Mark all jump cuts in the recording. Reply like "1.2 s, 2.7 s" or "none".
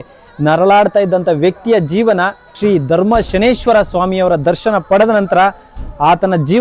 2.5 s